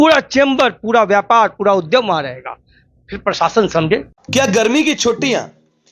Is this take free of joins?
yes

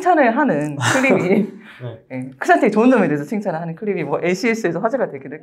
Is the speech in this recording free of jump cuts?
yes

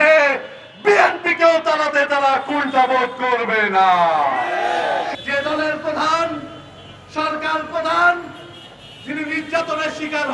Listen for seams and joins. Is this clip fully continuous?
no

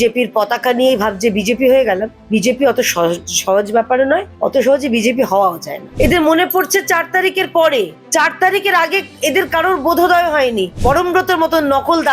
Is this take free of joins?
no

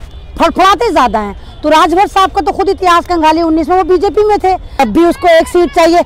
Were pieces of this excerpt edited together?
yes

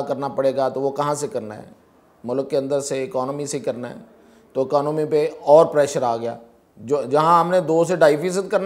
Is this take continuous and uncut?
yes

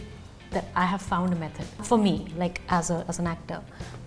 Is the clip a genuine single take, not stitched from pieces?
no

